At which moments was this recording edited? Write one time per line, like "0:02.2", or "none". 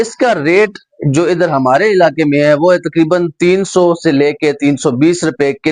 none